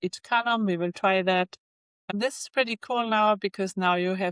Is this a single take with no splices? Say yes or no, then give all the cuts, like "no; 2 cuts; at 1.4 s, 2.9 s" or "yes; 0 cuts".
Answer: no; 1 cut; at 2.1 s